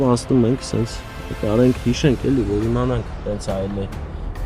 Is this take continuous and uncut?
yes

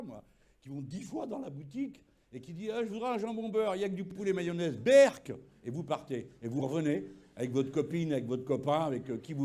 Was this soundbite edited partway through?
no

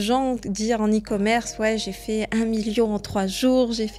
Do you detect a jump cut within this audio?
no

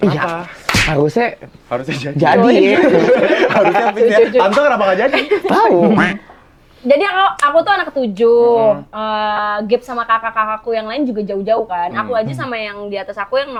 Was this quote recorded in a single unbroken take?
yes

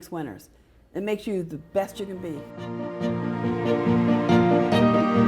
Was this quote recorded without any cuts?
no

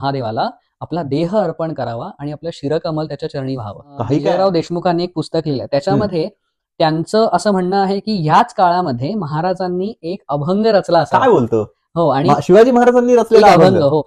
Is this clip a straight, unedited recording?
no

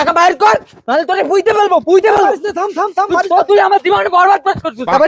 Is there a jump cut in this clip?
no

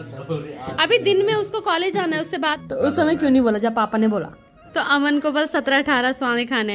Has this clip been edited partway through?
yes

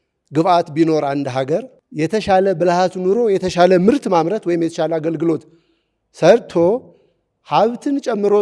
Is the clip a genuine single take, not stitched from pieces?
no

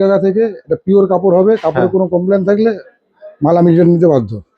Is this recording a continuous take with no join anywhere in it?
yes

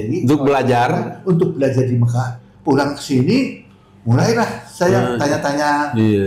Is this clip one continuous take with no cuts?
no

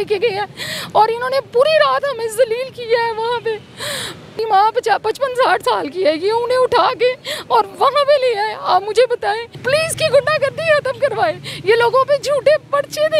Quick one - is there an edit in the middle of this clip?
yes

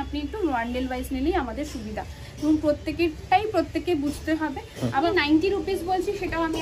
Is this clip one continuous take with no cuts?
no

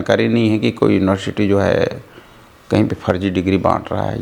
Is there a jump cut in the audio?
no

